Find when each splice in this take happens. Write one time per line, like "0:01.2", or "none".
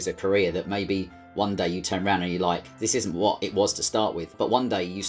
0:02.7
0:04.3